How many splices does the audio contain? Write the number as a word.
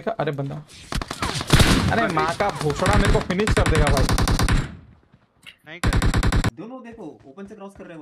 one